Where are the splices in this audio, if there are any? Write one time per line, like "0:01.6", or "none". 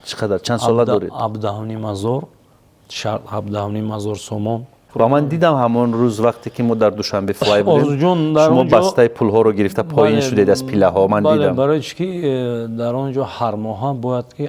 0:04.8